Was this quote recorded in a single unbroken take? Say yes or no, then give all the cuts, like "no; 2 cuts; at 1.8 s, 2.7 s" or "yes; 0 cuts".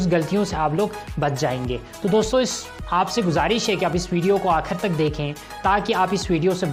yes; 0 cuts